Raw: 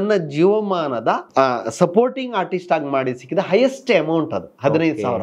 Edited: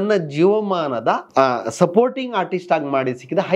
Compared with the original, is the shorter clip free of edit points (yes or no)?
yes